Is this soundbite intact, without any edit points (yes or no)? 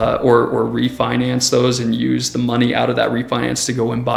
yes